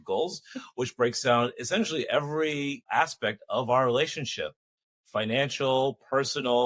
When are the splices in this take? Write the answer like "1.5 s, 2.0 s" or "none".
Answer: 2.9 s